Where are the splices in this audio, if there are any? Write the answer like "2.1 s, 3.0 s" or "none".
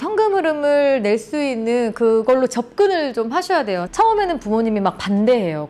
3.9 s